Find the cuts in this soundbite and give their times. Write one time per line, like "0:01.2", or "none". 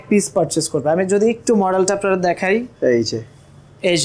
none